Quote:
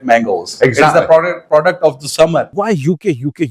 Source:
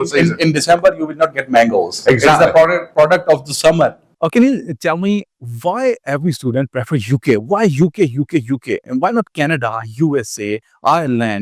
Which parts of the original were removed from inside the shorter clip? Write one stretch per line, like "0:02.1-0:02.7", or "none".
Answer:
0:04.0-0:07.4